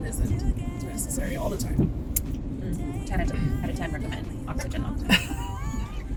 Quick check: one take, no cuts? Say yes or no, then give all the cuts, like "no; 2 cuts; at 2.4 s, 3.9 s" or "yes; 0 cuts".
yes; 0 cuts